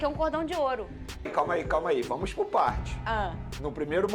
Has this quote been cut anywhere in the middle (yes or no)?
yes